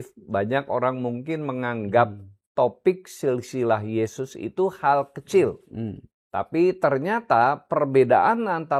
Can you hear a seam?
no; 0 cuts

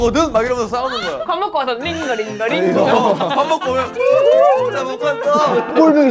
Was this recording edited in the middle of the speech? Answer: no; 0 cuts

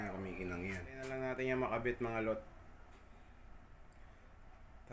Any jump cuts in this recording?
yes; 1 cut; at 1.1 s

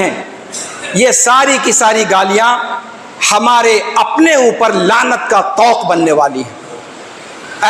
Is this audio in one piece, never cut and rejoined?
yes; 0 cuts

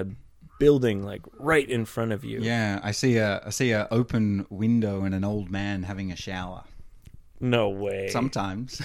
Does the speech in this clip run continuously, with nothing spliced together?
yes; 0 cuts

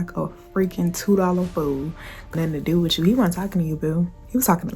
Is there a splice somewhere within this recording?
yes; 1 cut; at 2.2 s

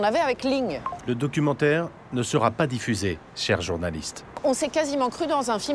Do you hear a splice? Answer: yes; 3 cuts; at 0.9 s, 3.3 s, 4.4 s

